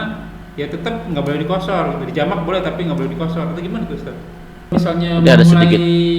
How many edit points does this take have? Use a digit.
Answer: 1